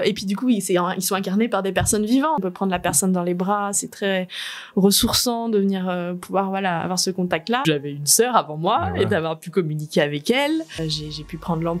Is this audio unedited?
no; 3 cuts; at 2.4 s, 7.7 s, 10.8 s

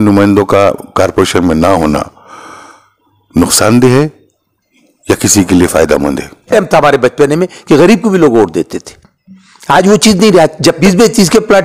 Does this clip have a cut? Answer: yes; 2 cuts; at 6.5 s, 10.8 s

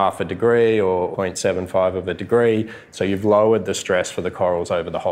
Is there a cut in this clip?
yes; 2 cuts; at 1.1 s, 2.9 s

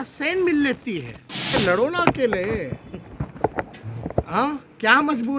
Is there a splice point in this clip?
yes; 1 cut; at 1.5 s

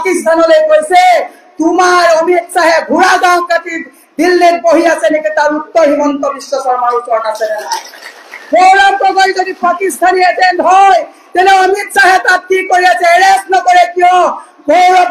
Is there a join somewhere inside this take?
no; 0 cuts

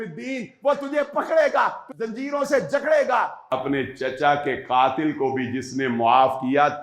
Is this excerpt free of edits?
no; 2 cuts; at 1.9 s, 3.5 s

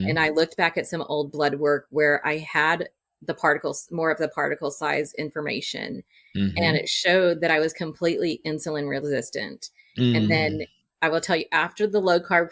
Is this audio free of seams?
yes; 0 cuts

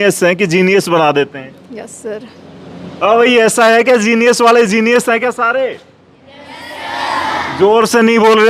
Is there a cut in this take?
no; 0 cuts

